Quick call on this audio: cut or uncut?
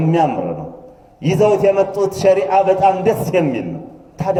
uncut